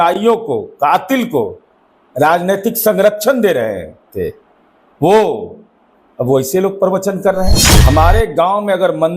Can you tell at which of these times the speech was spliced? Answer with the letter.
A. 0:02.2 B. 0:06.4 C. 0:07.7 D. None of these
C